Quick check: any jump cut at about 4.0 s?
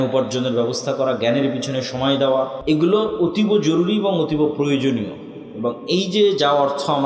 no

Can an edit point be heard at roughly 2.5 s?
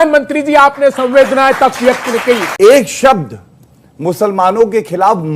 yes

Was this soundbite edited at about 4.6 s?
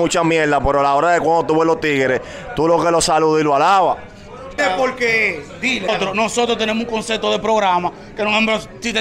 yes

